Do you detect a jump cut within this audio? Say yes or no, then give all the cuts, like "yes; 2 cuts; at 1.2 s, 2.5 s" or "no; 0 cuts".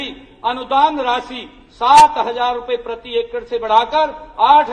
no; 0 cuts